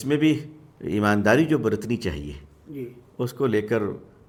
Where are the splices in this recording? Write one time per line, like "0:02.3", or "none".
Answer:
none